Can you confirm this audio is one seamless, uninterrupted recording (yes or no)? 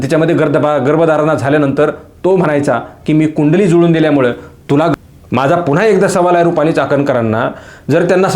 no